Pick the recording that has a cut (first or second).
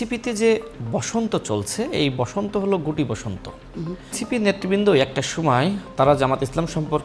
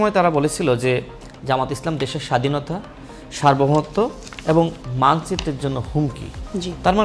first